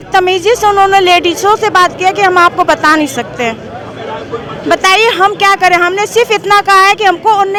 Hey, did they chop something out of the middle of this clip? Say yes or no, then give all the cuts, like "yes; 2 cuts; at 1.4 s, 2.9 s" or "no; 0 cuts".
no; 0 cuts